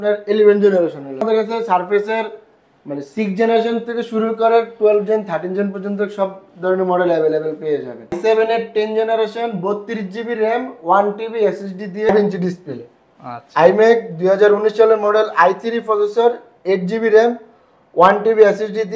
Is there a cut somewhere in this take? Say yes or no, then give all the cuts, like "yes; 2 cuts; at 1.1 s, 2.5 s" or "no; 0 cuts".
yes; 3 cuts; at 1.2 s, 8.2 s, 12.1 s